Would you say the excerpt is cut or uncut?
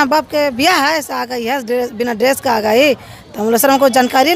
uncut